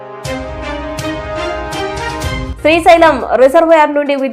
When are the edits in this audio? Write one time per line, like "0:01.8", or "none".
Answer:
0:02.5